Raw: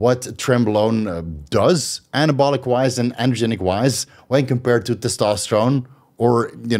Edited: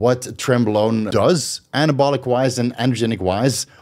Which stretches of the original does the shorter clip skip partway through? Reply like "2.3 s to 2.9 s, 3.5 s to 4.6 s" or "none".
1.1 s to 1.5 s